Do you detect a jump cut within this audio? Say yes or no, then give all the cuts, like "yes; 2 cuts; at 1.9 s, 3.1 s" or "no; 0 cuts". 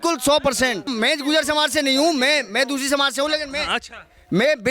yes; 1 cut; at 0.9 s